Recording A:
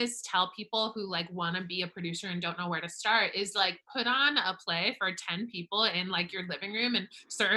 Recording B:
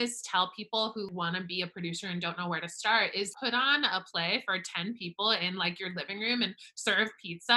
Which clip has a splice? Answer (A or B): B